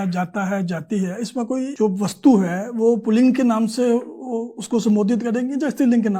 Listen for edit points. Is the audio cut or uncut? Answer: cut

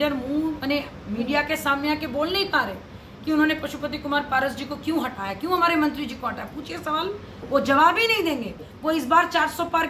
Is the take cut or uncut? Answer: uncut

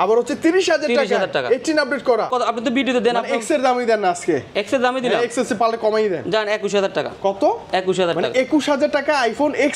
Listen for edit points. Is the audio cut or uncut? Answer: cut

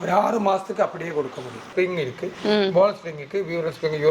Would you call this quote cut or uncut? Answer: cut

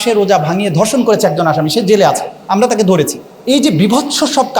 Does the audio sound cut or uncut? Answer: cut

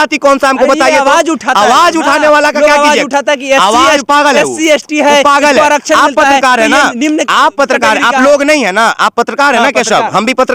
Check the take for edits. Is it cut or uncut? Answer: uncut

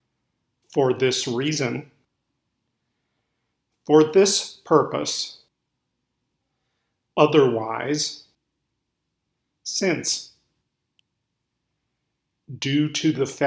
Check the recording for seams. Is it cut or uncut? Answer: cut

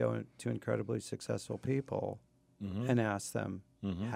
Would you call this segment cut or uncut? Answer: uncut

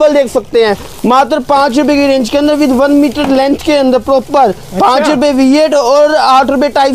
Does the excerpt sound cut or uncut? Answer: uncut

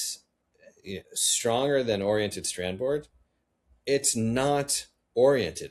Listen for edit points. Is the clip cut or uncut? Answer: uncut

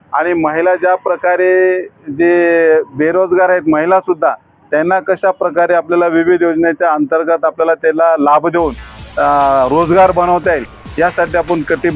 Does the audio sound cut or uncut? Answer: uncut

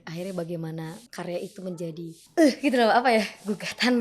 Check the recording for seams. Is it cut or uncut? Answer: cut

